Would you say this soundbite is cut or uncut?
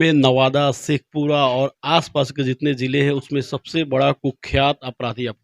uncut